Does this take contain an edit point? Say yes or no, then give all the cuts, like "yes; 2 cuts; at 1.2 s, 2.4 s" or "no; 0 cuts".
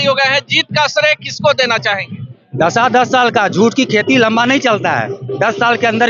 no; 0 cuts